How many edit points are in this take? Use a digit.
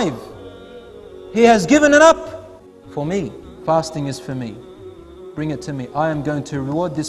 1